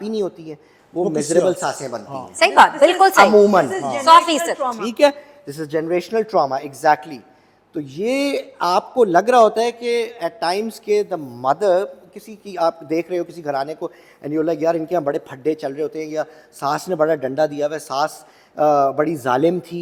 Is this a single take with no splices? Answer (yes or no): yes